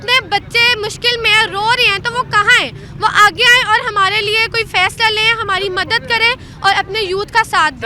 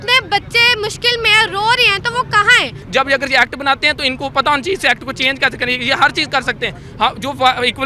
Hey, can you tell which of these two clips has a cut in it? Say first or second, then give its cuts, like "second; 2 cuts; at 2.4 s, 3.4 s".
second; 1 cut; at 2.8 s